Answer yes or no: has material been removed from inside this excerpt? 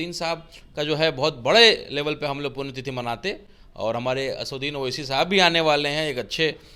no